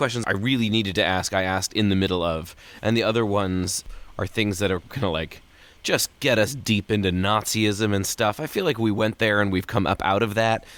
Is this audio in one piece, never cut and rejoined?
yes; 0 cuts

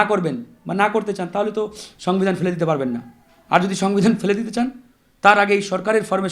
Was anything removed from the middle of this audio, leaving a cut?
no; 0 cuts

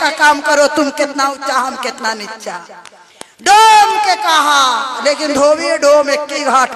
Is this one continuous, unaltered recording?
yes; 0 cuts

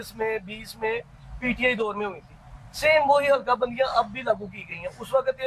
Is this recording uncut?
yes; 0 cuts

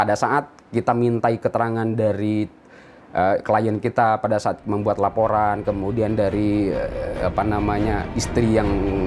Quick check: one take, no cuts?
yes; 0 cuts

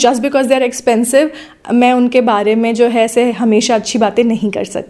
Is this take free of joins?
yes; 0 cuts

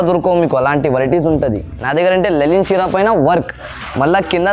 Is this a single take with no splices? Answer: no; 1 cut; at 1.9 s

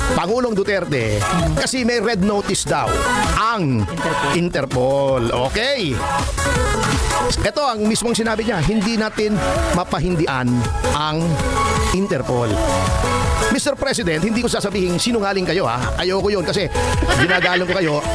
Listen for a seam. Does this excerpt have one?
no; 0 cuts

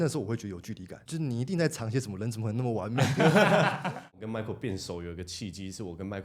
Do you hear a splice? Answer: yes; 2 cuts; at 1.0 s, 4.2 s

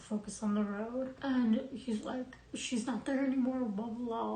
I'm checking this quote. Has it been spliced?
yes; 1 cut; at 1.1 s

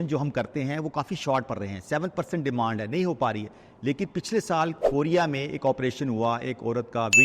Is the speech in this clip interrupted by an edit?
no; 0 cuts

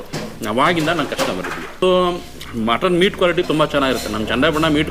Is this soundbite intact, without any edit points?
no; 1 cut; at 1.8 s

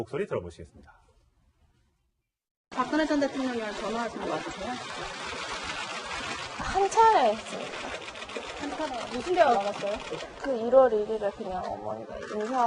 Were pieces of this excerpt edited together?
yes; 1 cut; at 3.3 s

